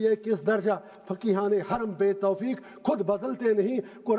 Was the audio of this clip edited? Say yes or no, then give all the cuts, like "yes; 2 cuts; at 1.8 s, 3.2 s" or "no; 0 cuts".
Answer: no; 0 cuts